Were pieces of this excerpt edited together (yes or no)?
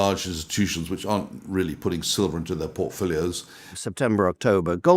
yes